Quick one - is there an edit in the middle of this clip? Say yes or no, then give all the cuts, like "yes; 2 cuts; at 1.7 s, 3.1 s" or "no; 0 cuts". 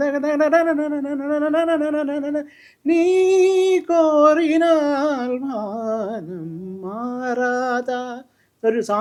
no; 0 cuts